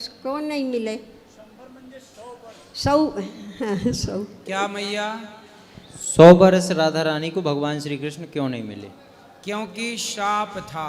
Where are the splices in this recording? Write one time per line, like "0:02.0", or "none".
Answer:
none